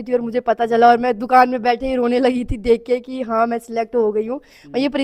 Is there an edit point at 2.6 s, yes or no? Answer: no